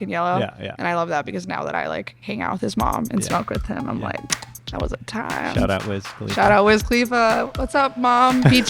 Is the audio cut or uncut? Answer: uncut